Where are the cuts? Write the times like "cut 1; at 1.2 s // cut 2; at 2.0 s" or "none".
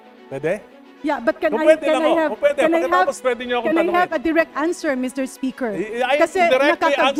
none